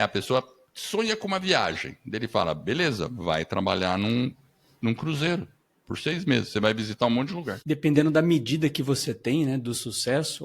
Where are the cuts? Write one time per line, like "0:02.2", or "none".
0:07.5